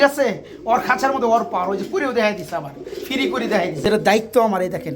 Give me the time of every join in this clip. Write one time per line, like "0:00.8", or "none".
0:03.9